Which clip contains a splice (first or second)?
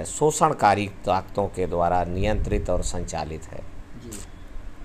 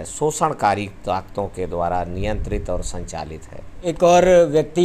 second